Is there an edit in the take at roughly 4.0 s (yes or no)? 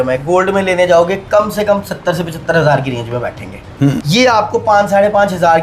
yes